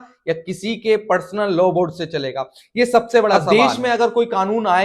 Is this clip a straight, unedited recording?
no; 1 cut; at 3.4 s

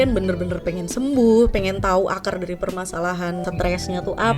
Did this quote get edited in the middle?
yes; 1 cut; at 3.4 s

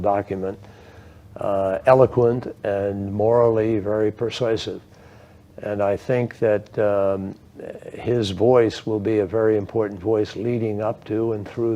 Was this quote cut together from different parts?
yes; 1 cut; at 5.0 s

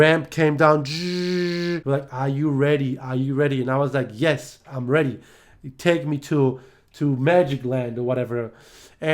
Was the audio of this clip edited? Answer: yes; 1 cut; at 1.8 s

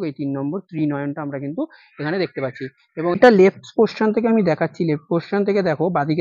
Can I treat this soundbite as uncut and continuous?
no; 1 cut; at 3.2 s

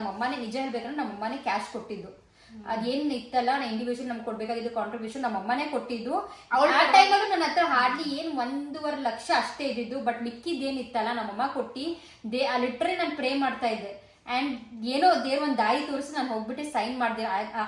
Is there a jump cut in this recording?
no; 0 cuts

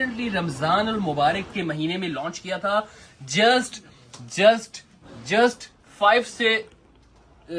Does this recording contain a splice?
no; 0 cuts

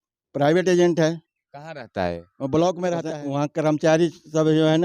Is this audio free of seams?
no; 1 cut; at 3.1 s

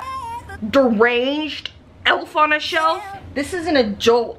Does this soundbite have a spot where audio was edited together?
yes; 1 cut; at 3.2 s

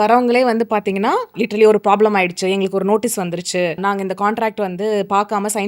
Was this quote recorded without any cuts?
yes; 0 cuts

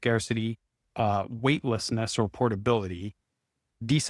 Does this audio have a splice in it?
no; 0 cuts

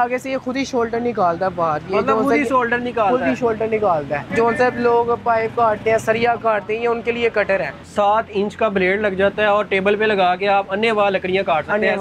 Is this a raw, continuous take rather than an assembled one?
no; 2 cuts; at 4.2 s, 7.8 s

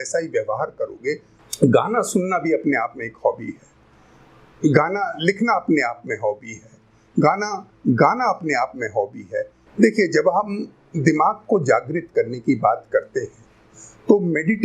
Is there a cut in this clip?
yes; 2 cuts; at 1.3 s, 9.6 s

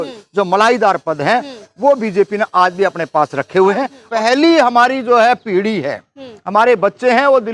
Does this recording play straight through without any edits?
no; 1 cut; at 4.0 s

